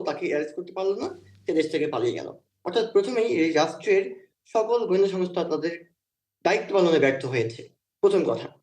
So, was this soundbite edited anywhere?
no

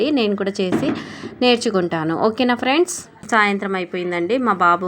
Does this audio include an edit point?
yes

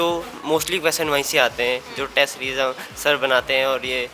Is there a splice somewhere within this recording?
no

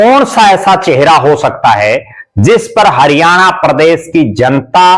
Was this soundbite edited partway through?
no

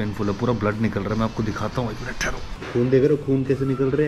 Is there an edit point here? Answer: yes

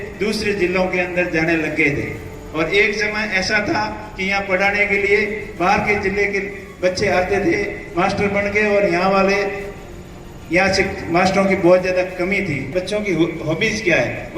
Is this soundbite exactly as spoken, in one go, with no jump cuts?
no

